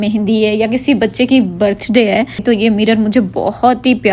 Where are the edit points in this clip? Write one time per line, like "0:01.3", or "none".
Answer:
0:02.4